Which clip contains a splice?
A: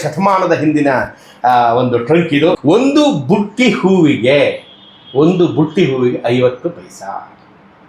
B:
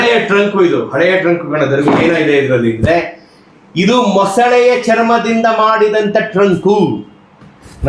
A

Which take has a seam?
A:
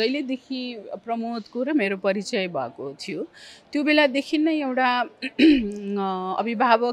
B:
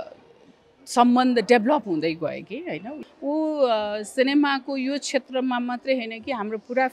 B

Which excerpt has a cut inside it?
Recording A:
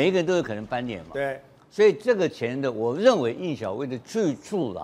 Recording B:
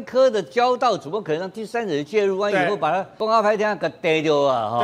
B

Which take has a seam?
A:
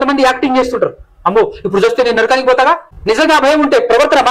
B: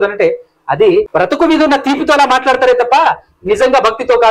B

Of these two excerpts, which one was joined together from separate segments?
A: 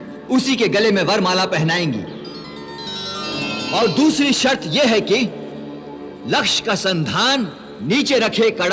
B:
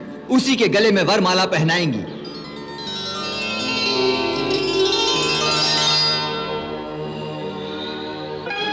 A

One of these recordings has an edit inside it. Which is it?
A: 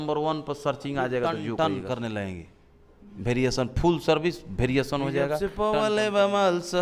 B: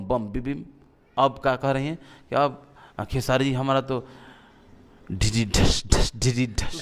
A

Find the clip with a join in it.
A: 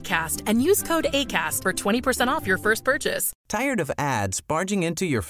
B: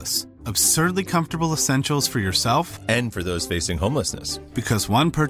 A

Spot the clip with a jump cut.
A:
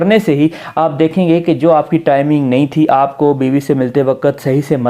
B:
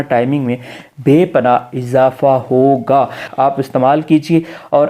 B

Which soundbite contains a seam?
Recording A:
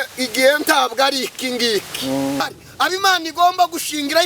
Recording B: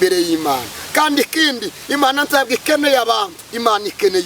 A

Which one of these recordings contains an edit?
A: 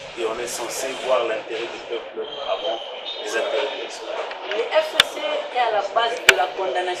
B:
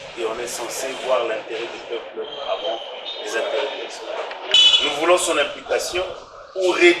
B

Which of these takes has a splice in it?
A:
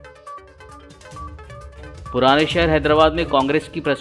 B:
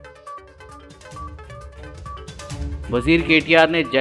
A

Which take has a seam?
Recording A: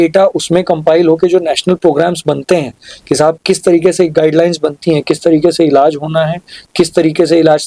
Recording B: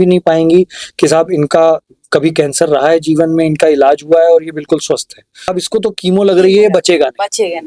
B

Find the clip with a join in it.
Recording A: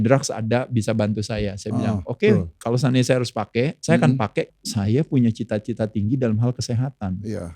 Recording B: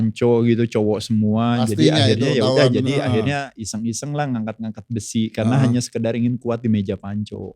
A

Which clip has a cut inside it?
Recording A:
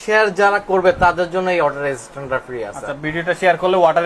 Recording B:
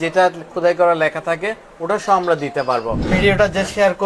B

